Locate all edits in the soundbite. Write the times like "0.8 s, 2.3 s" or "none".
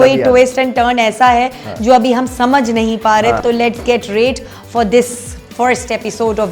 3.4 s